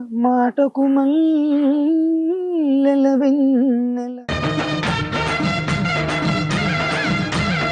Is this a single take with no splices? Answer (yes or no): no